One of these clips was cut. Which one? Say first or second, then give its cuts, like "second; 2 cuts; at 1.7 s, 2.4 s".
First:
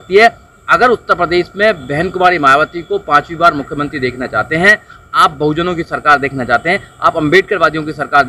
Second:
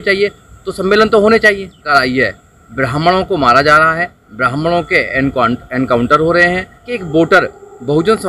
second; 2 cuts; at 1.9 s, 6.9 s